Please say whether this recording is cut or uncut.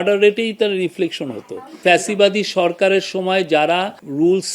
cut